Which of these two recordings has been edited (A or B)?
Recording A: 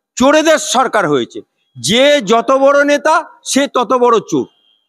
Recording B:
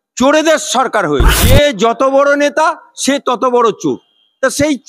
B